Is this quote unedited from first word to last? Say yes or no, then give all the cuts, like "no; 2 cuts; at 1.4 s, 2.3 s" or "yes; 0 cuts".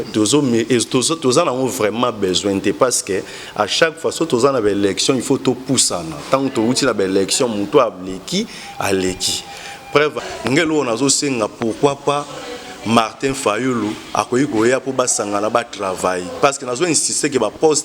no; 1 cut; at 10.2 s